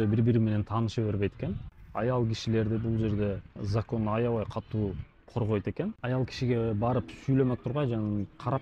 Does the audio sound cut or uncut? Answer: uncut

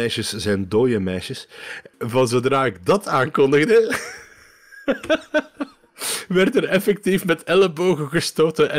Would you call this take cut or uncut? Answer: cut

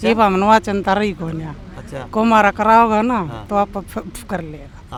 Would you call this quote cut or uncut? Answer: uncut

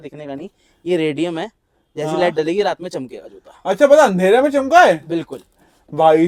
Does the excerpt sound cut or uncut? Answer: uncut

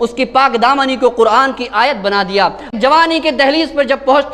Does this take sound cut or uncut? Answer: cut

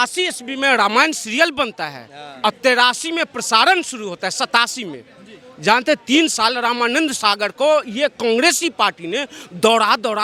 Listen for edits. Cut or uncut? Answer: uncut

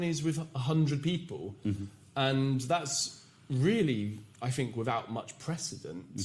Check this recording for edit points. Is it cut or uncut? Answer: uncut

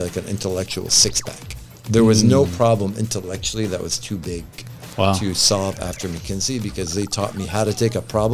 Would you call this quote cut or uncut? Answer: uncut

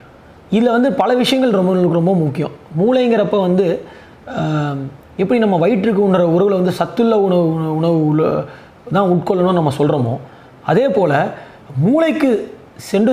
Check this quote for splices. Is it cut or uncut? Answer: uncut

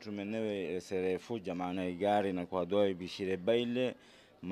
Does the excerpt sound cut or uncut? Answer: uncut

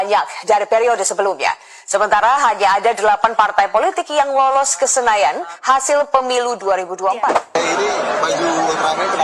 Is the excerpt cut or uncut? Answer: cut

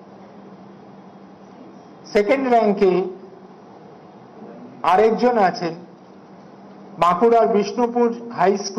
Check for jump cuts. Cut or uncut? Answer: uncut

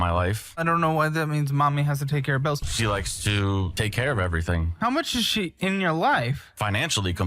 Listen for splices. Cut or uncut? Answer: cut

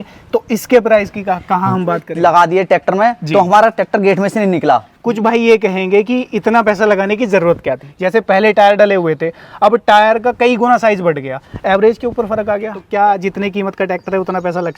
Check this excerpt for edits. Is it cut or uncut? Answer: cut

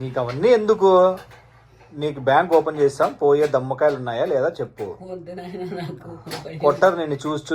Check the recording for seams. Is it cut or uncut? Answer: uncut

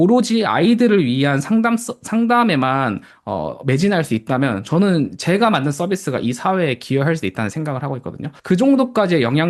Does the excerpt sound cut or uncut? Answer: cut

